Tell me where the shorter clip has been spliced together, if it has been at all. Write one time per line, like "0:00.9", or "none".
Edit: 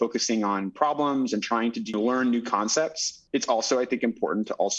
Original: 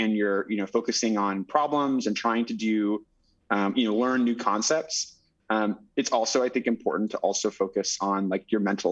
0:01.9
0:03.2